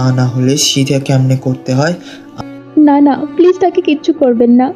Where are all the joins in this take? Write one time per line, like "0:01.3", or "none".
0:02.2